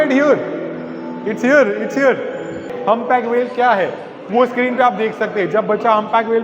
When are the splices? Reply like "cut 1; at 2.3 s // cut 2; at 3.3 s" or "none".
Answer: cut 1; at 2.7 s